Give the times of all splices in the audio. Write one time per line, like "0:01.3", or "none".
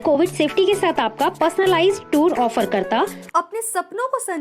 0:03.2